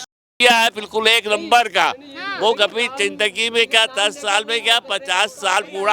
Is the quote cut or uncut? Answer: uncut